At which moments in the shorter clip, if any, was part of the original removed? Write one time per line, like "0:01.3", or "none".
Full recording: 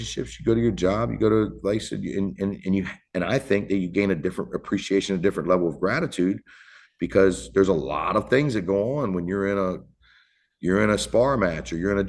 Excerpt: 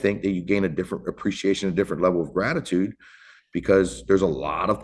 none